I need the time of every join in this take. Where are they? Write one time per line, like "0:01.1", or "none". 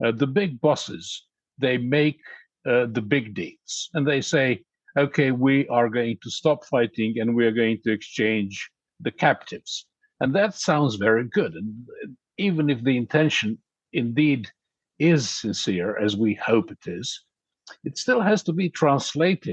none